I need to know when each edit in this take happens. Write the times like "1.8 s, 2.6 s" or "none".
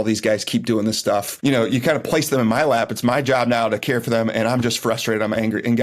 1.3 s